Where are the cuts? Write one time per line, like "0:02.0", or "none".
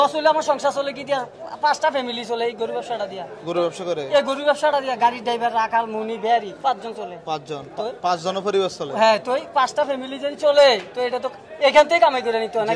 none